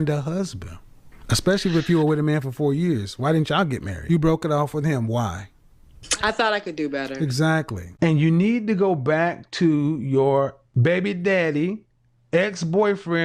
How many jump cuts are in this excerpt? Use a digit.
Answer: 2